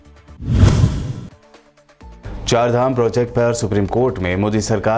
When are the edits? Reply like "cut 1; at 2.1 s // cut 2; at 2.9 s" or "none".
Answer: cut 1; at 1.0 s